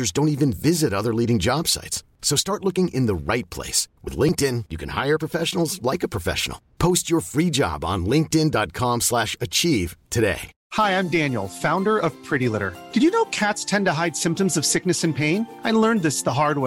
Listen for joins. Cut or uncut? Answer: cut